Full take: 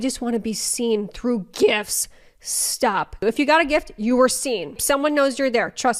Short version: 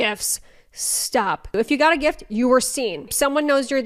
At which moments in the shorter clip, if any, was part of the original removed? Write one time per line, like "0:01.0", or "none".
none